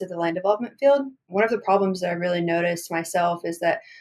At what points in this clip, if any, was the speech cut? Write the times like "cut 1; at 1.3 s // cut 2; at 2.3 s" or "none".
cut 1; at 1.3 s